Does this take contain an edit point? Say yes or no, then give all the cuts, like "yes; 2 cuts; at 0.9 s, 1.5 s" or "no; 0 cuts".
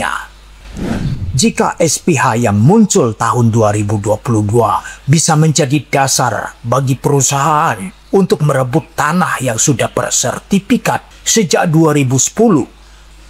yes; 1 cut; at 11.1 s